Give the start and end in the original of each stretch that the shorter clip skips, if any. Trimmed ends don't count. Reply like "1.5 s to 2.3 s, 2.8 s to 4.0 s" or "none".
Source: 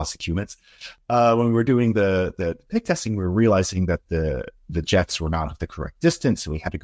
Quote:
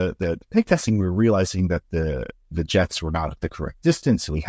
none